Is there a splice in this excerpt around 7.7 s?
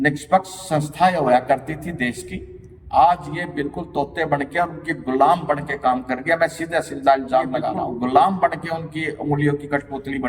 yes; 1 cut; at 7.7 s

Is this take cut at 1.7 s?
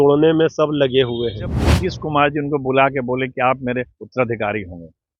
yes; 1 cut; at 1.7 s

